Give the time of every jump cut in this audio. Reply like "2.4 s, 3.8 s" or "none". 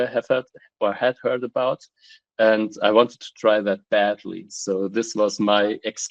none